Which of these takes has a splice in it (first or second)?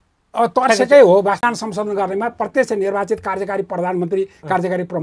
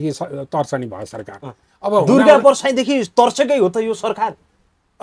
first